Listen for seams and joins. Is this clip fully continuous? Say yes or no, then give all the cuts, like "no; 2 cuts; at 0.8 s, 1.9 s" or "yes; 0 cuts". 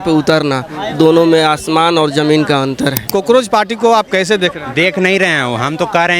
no; 1 cut; at 3.1 s